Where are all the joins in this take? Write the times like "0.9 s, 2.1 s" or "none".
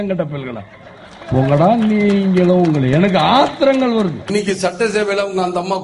4.2 s